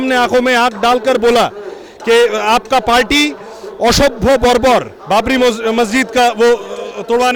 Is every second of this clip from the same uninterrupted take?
yes; 0 cuts

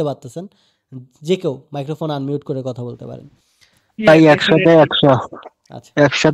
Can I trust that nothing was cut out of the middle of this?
yes; 0 cuts

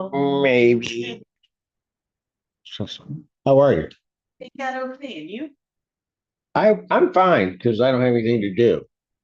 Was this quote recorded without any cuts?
no; 1 cut; at 1.3 s

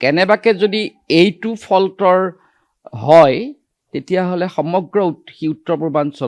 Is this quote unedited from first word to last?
yes; 0 cuts

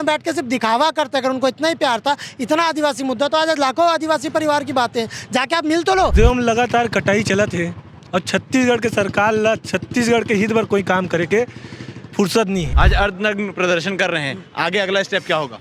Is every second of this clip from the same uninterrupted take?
no; 2 cuts; at 6.1 s, 12.7 s

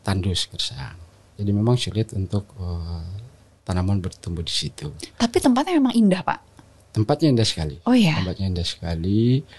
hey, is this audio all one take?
no; 1 cut; at 1.3 s

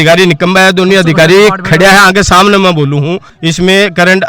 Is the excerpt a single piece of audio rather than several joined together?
no; 1 cut; at 3.2 s

